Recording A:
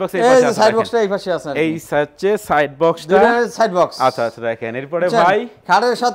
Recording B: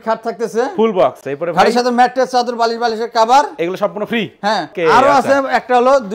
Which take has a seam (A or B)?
B